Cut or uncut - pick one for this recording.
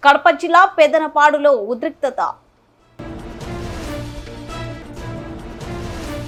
uncut